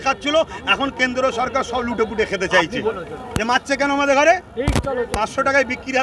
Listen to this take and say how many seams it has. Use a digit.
1